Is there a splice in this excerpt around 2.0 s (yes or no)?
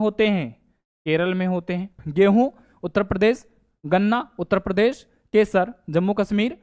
yes